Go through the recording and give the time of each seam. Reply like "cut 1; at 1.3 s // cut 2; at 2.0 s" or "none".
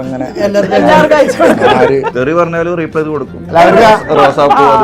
cut 1; at 2.1 s

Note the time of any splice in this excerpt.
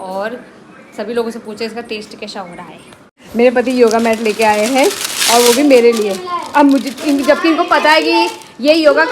cut 1; at 3.2 s

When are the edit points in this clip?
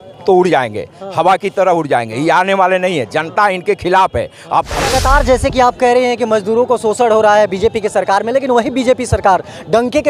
cut 1; at 4.8 s

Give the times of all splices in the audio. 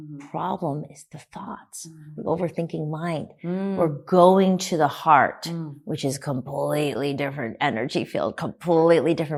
none

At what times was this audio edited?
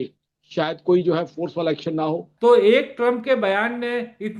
cut 1; at 2.3 s

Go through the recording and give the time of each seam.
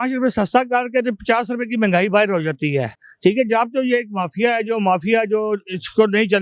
none

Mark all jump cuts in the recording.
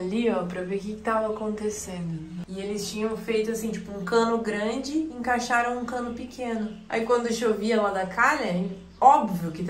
cut 1; at 2.4 s // cut 2; at 6.8 s

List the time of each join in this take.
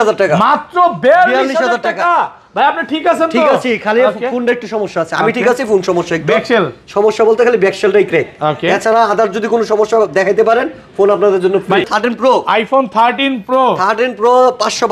cut 1; at 11.8 s

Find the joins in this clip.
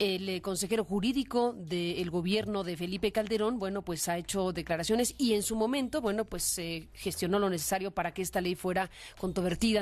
cut 1; at 6.6 s

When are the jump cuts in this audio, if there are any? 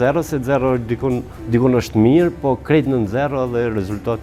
cut 1; at 1.3 s

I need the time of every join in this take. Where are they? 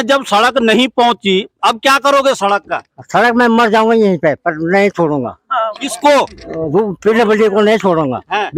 none

